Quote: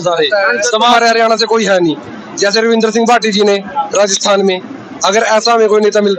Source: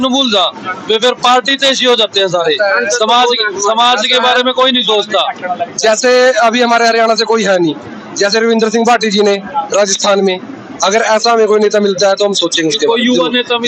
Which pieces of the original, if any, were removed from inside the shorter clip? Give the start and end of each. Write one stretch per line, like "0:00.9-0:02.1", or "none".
0:03.2-0:06.7